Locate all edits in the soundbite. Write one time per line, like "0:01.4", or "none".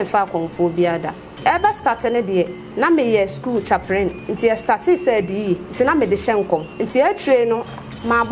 0:01.4
0:02.6
0:04.2
0:05.7
0:06.7